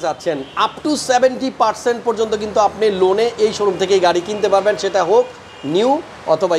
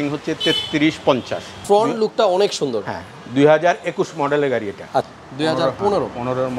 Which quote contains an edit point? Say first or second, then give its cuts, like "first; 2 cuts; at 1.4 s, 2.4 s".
second; 2 cuts; at 1.5 s, 5.1 s